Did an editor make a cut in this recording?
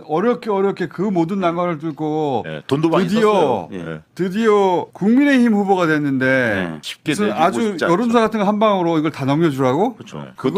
no; 0 cuts

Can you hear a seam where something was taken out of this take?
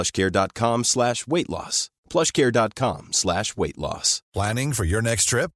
yes; 1 cut; at 4.1 s

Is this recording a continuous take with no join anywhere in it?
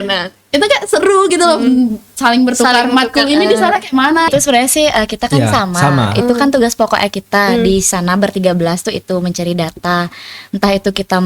no; 1 cut; at 4.3 s

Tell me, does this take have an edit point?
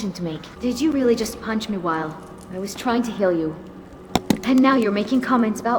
yes; 1 cut; at 0.9 s

